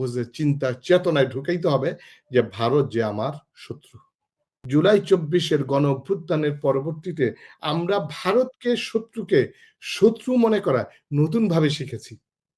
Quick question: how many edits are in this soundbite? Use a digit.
1